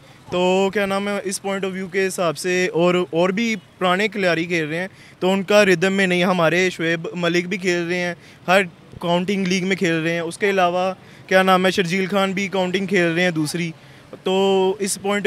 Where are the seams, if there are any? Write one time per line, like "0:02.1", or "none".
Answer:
none